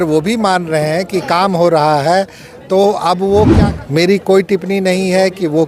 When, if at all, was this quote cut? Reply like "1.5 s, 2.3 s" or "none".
3.5 s